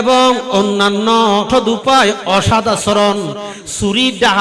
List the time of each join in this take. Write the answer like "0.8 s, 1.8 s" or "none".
1.5 s

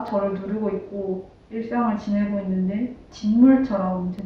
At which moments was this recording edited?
3.1 s

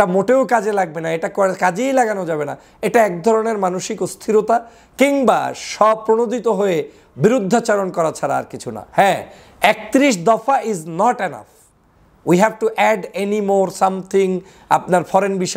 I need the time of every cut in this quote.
none

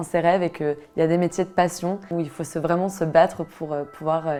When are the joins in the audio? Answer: none

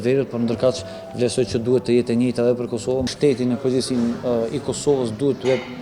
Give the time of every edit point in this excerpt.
3.1 s

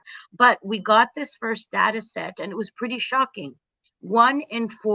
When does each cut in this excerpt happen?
none

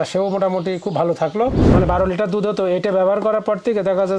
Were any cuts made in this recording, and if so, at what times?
1.7 s

